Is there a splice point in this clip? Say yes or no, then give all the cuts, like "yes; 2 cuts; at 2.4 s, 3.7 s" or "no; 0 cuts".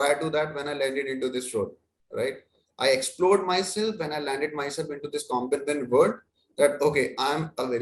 no; 0 cuts